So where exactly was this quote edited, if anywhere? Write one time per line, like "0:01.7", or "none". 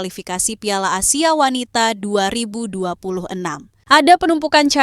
0:03.7